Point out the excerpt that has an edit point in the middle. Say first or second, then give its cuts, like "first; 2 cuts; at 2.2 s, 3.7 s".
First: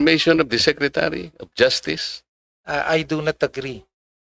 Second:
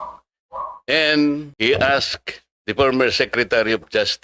second; 1 cut; at 1.5 s